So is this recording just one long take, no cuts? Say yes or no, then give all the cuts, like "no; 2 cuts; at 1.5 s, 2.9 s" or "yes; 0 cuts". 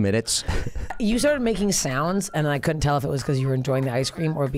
no; 1 cut; at 0.9 s